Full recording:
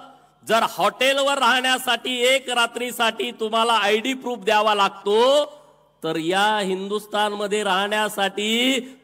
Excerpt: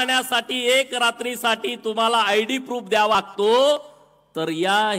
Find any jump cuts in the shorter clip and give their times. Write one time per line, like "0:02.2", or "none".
0:03.2